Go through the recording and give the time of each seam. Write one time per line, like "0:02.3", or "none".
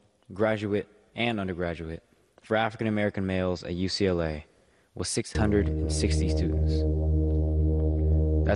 none